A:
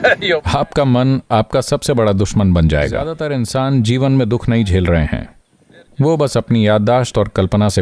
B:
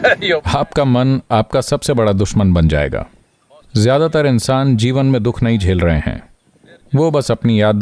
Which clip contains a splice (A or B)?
A